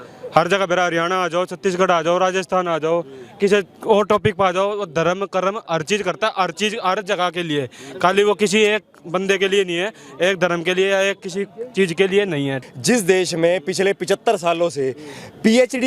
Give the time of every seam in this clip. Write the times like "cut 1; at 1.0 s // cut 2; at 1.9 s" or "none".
cut 1; at 12.6 s